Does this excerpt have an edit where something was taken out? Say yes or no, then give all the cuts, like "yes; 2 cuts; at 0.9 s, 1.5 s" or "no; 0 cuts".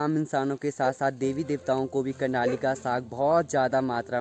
no; 0 cuts